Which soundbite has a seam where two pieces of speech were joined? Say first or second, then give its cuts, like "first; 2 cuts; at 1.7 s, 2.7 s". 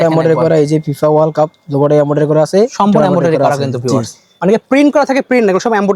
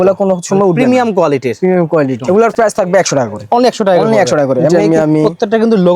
second; 2 cuts; at 2.2 s, 4.8 s